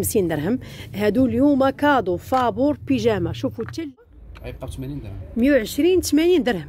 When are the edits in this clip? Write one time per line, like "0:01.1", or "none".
0:04.2